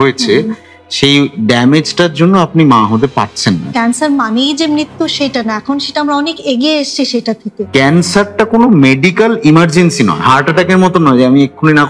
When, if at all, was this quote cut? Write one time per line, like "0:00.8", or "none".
0:03.7
0:07.5